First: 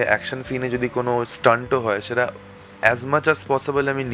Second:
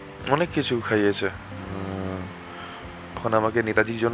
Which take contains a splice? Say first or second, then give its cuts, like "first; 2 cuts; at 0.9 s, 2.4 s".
second; 1 cut; at 3.2 s